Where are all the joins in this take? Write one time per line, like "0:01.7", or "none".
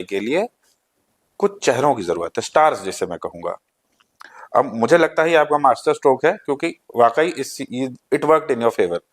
none